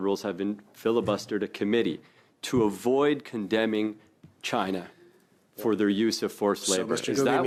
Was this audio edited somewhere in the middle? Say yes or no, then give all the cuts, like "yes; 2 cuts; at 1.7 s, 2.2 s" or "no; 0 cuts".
no; 0 cuts